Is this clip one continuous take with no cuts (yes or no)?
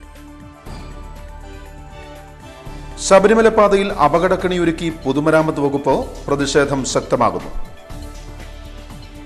no